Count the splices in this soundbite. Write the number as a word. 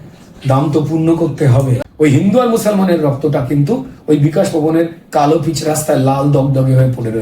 one